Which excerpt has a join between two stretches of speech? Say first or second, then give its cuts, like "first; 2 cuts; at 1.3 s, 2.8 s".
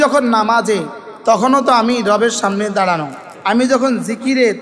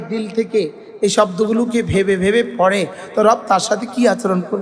first; 1 cut; at 3.2 s